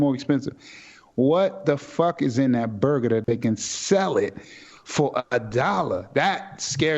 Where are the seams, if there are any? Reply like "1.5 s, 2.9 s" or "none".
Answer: 3.2 s